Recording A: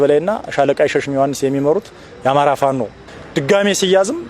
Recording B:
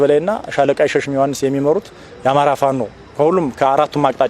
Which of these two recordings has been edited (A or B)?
A